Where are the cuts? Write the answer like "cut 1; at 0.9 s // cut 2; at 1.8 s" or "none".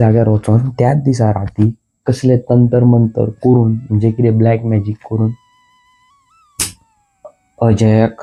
none